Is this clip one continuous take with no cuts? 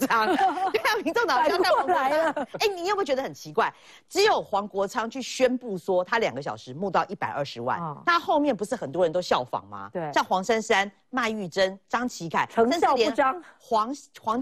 yes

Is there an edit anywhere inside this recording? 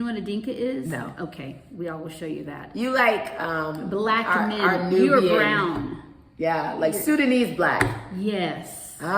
no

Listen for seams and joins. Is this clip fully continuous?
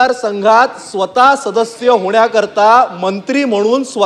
yes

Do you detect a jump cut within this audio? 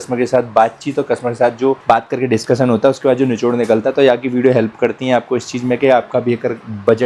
no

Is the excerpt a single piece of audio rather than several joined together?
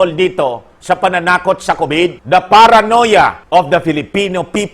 no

